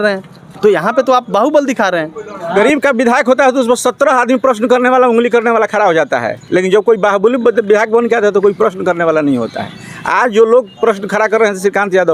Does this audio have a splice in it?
yes; 1 cut; at 2.4 s

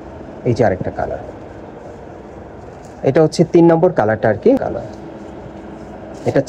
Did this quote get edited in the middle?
yes; 1 cut; at 4.6 s

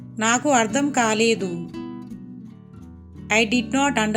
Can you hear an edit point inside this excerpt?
yes; 2 cuts; at 1.7 s, 3.3 s

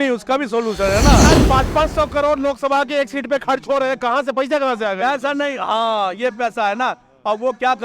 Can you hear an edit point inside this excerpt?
yes; 1 cut; at 1.2 s

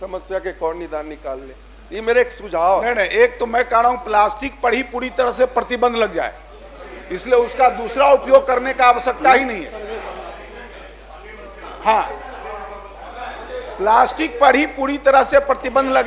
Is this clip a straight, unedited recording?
yes; 0 cuts

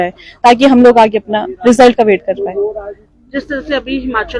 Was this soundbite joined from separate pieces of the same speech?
no; 0 cuts

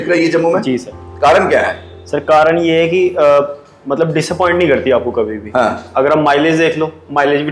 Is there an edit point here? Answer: no; 0 cuts

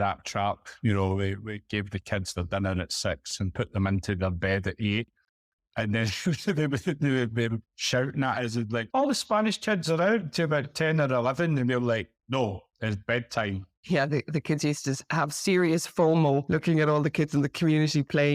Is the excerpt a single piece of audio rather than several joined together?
yes; 0 cuts

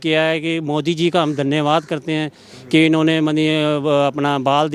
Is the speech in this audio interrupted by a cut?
no; 0 cuts

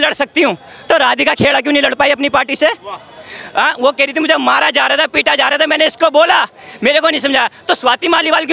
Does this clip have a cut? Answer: no; 0 cuts

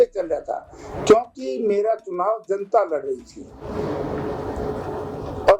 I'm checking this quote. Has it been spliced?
no; 0 cuts

